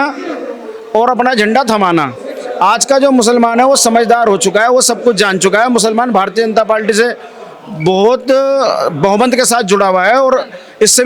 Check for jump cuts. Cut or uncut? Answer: uncut